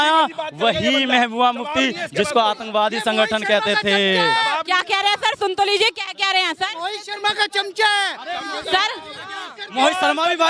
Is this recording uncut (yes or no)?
yes